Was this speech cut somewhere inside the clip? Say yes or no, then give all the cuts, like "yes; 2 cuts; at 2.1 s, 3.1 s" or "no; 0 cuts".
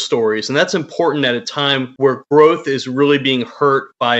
no; 0 cuts